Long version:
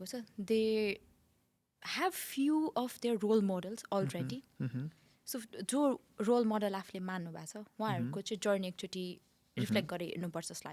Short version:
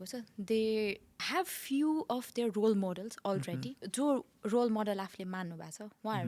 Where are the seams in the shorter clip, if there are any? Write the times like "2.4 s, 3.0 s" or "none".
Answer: 1.1 s, 3.8 s